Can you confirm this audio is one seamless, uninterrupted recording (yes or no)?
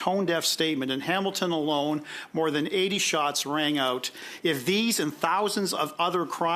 no